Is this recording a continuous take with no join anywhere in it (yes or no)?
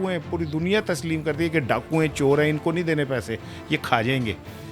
yes